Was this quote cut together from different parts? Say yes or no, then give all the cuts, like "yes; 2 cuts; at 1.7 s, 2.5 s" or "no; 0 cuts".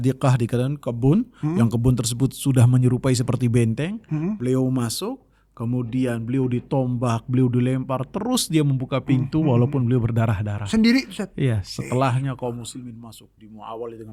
no; 0 cuts